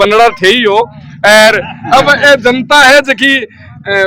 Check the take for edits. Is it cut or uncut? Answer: uncut